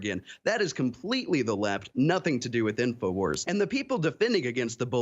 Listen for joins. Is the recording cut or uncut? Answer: cut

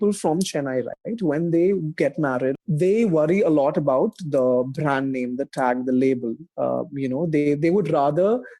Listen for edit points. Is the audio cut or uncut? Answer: cut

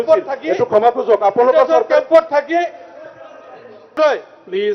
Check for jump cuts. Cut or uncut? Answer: uncut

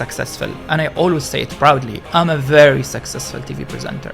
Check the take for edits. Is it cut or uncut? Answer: uncut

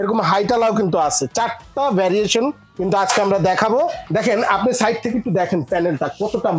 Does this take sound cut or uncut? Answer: cut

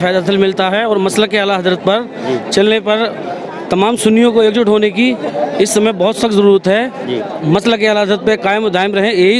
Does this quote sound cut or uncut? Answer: uncut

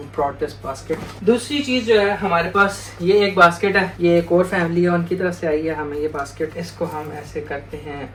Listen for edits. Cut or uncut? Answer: uncut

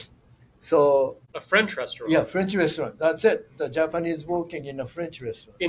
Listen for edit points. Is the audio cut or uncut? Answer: cut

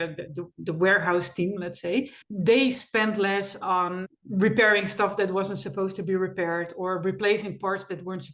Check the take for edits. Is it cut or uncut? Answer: cut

